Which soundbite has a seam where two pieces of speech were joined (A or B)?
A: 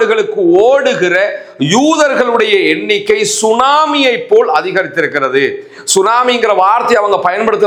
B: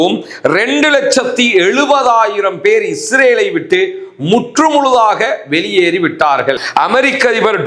B